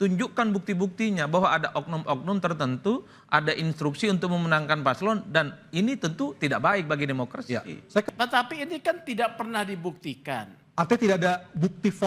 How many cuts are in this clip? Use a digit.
1